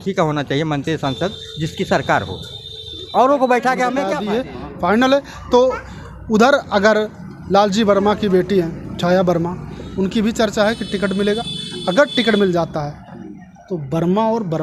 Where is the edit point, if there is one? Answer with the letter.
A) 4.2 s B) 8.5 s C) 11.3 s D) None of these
A